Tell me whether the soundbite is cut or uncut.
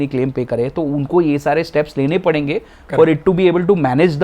uncut